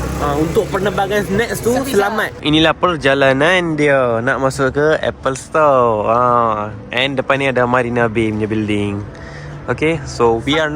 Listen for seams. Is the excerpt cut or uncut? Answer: cut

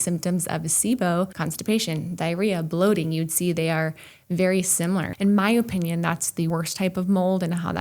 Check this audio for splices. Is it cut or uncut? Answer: cut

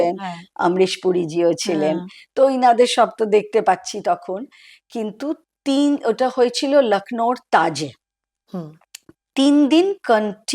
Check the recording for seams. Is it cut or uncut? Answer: uncut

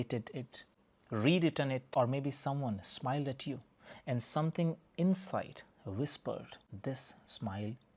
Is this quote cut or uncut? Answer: cut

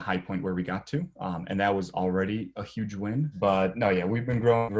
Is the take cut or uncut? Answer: cut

